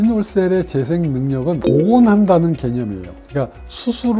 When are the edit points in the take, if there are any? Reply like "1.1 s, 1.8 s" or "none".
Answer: 1.7 s